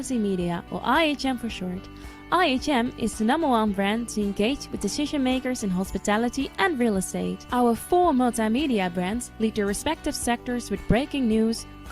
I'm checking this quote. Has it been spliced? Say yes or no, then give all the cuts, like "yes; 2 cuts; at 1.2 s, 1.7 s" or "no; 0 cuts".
no; 0 cuts